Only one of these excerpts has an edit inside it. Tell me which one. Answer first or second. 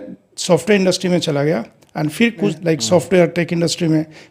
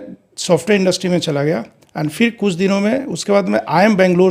first